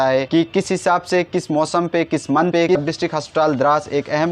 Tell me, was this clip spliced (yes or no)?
yes